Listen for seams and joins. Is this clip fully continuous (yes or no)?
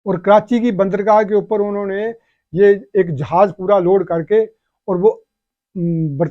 yes